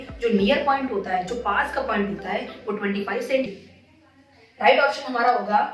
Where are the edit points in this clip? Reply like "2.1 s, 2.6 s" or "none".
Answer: 3.5 s